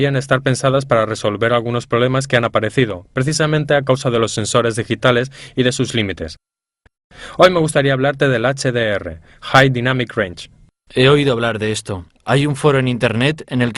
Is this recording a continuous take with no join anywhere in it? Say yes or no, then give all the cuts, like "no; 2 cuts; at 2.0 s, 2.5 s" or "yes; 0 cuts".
yes; 0 cuts